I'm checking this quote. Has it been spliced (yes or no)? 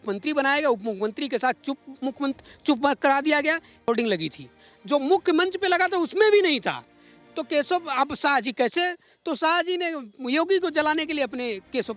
yes